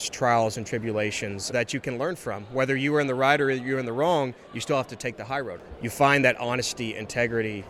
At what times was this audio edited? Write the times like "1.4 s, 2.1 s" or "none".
1.5 s, 5.6 s